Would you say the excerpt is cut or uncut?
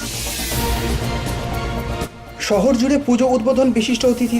cut